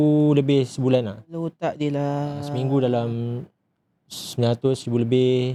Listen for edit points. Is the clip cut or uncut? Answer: uncut